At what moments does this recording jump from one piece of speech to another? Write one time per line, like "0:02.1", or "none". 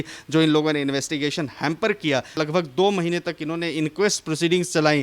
0:02.3